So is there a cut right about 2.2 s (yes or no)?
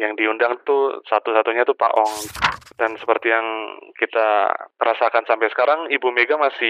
yes